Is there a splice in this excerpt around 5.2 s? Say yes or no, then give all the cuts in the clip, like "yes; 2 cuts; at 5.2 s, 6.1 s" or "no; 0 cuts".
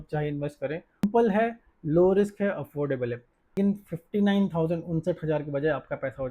no; 2 cuts; at 1.0 s, 3.5 s